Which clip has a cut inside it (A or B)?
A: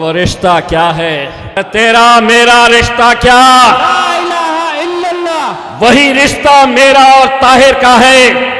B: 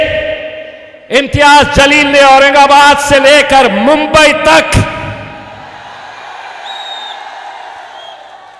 A